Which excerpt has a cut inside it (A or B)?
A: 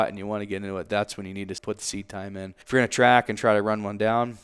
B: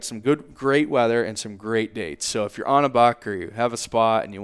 A